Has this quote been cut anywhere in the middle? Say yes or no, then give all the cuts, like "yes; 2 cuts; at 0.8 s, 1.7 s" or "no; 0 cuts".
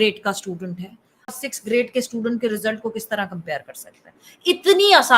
yes; 1 cut; at 1.3 s